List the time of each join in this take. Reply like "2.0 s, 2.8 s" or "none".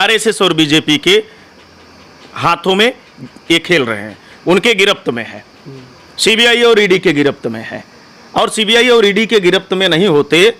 none